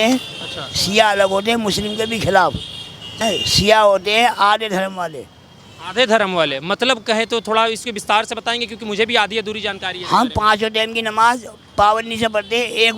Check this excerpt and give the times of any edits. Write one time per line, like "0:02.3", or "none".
0:03.1